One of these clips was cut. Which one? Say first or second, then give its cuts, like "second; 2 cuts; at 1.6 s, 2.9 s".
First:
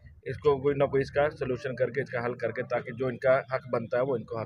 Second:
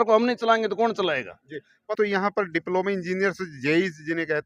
second; 1 cut; at 1.9 s